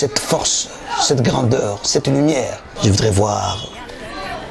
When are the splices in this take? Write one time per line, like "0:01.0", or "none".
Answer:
0:02.7